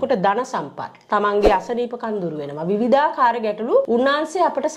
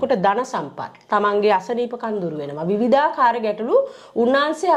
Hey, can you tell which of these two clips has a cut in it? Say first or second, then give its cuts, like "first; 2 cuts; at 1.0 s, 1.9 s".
first; 1 cut; at 3.9 s